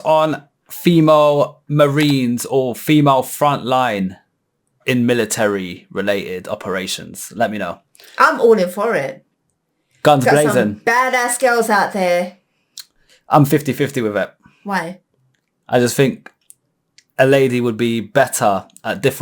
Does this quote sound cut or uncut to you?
cut